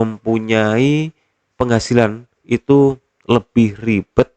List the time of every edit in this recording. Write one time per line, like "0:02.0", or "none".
none

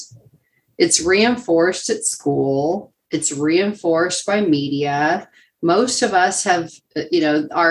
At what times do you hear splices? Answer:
none

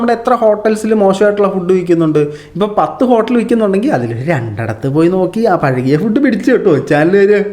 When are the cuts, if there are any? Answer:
none

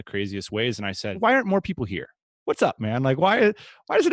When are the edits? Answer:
0:01.2

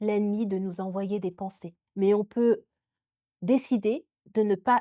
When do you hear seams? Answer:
none

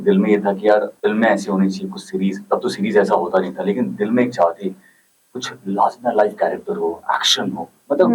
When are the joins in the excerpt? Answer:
0:00.9

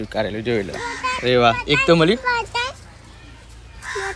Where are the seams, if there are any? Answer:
none

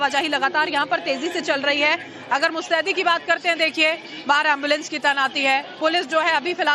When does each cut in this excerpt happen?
0:01.4

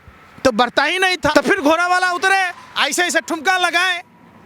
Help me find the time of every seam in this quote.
0:01.3

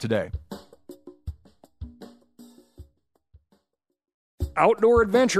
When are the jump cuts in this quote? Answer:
0:04.5

